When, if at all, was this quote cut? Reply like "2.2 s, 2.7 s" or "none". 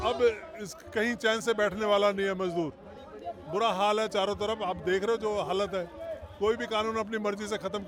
none